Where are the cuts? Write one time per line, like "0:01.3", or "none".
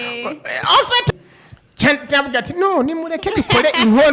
0:01.2